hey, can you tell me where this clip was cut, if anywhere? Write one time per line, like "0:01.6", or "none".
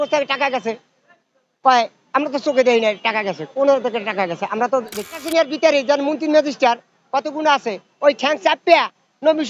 0:05.1